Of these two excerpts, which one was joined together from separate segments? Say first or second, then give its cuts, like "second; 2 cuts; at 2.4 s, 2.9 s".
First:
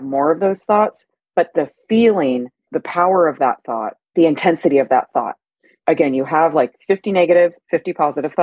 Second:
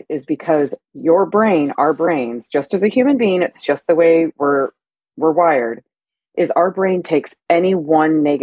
first; 3 cuts; at 2.7 s, 3.9 s, 5.8 s